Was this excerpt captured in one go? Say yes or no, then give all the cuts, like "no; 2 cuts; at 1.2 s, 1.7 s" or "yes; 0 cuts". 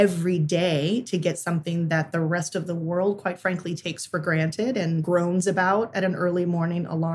no; 1 cut; at 5.1 s